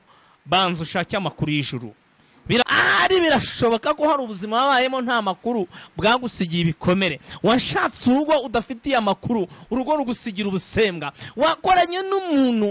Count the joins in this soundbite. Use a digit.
1